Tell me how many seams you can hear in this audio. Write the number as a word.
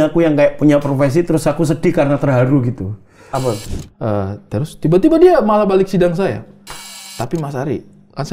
one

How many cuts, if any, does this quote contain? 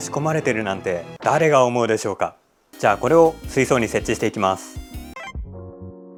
zero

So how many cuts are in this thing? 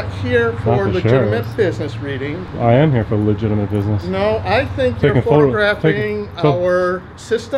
zero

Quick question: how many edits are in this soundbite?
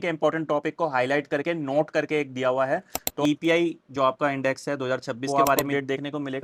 two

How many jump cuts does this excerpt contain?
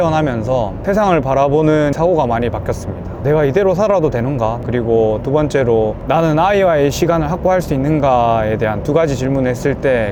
two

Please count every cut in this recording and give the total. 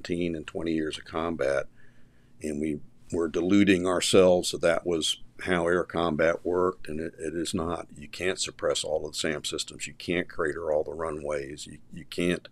zero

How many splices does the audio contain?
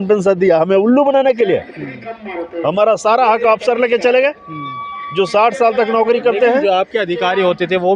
zero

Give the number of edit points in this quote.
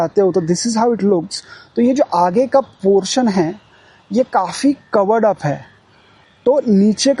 zero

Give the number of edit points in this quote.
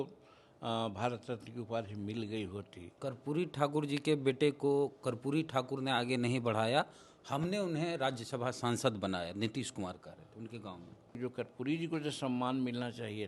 two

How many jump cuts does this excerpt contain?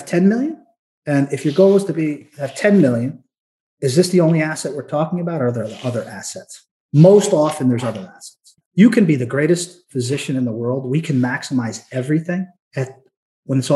two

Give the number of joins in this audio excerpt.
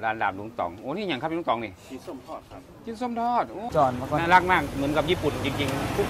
one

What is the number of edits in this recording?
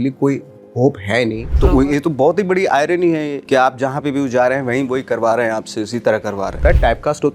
one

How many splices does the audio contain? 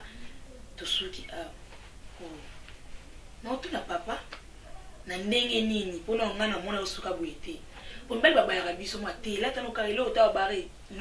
zero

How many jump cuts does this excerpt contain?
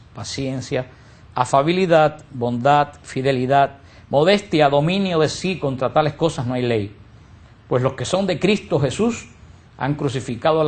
zero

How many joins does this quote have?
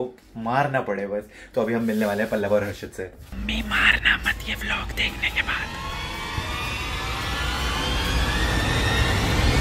one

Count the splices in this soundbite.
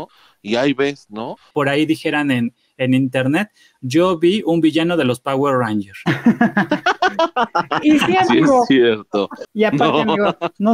two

